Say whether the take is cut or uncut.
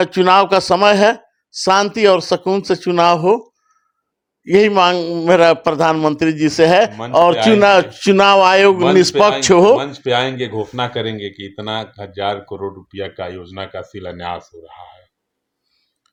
uncut